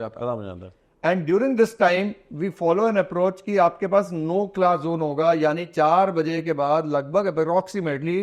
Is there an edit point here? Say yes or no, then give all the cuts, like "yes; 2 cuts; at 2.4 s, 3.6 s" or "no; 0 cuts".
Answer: no; 0 cuts